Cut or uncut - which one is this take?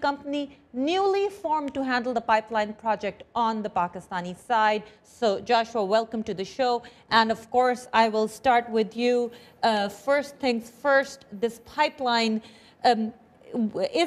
cut